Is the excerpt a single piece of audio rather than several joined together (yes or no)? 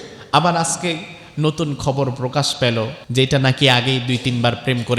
no